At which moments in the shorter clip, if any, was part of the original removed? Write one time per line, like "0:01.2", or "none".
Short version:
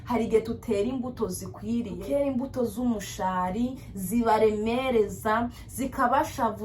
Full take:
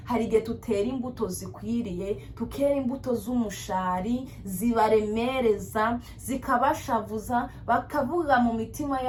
0:02.0